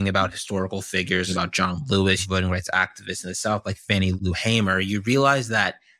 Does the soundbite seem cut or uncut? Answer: cut